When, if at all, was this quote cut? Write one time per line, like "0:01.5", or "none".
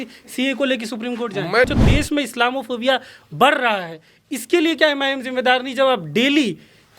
0:01.7